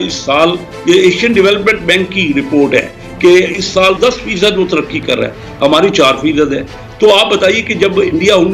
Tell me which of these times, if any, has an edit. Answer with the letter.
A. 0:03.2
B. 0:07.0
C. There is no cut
C